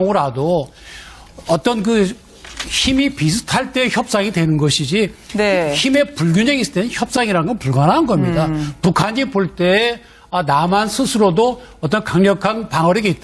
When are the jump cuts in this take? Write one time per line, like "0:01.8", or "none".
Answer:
none

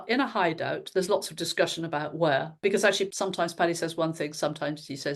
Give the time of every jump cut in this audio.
0:03.1

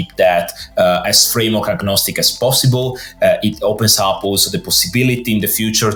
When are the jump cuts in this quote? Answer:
none

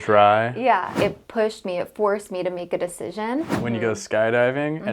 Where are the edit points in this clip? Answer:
0:01.0
0:03.5

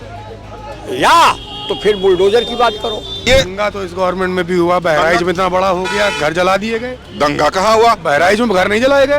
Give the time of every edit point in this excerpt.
0:03.2

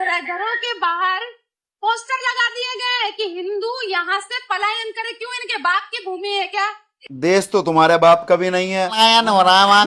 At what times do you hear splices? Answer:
0:08.9

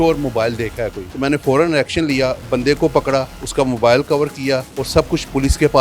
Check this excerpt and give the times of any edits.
0:01.1
0:03.4
0:04.7

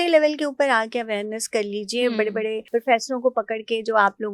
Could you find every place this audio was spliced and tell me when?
0:02.6

